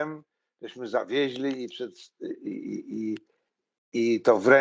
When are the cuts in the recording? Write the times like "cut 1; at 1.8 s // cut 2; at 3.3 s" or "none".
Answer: none